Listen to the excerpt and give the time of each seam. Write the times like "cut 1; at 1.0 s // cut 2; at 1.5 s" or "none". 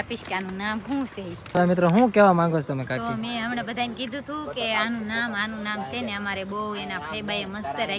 cut 1; at 1.5 s